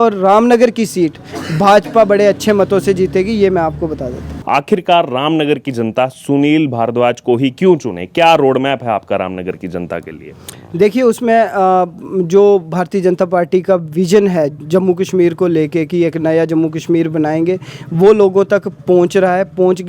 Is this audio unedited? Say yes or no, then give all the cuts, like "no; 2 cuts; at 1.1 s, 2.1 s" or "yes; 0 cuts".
no; 1 cut; at 4.3 s